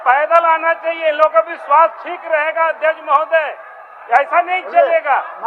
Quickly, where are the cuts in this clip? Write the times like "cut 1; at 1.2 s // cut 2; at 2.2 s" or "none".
none